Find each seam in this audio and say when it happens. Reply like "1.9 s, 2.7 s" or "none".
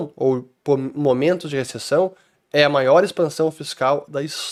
none